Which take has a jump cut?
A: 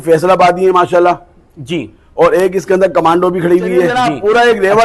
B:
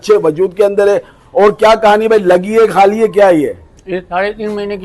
A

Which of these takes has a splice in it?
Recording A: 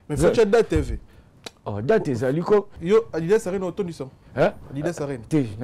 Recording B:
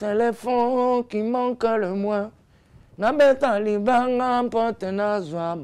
A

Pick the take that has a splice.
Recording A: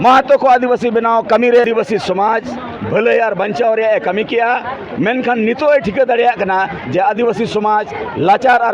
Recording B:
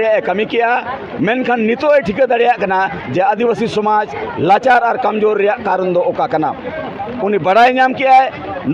A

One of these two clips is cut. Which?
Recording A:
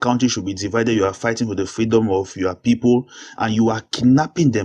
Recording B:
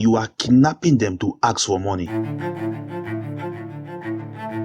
B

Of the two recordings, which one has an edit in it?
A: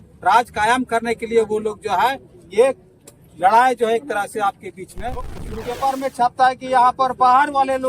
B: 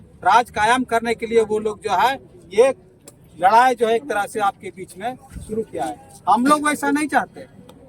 A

